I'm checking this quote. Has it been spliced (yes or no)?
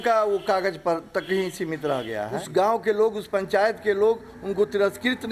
yes